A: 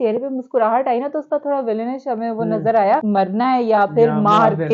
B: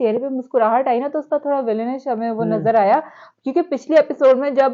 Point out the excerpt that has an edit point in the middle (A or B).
A